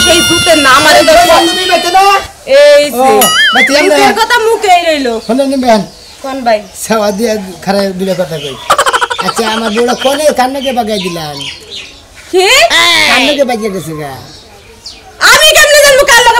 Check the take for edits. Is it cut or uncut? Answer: uncut